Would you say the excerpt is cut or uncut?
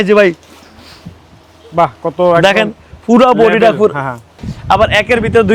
cut